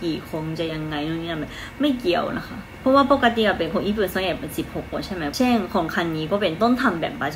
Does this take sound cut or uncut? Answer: uncut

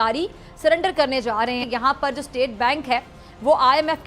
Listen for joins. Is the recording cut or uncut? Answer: cut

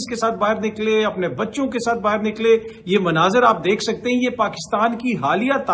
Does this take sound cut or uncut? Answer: uncut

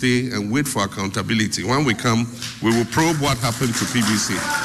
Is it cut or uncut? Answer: uncut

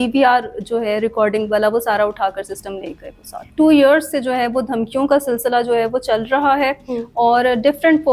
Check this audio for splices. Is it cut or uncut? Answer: cut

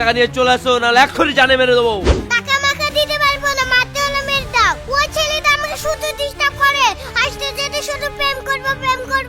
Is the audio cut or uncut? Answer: uncut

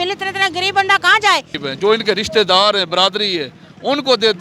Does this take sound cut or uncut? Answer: cut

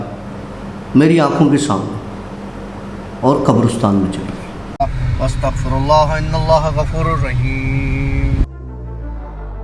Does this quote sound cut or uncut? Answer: cut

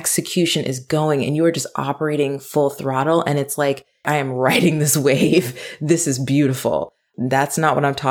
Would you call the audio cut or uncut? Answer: cut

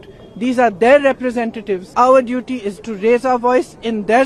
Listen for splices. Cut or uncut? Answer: cut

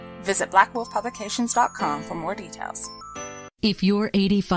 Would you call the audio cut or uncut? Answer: cut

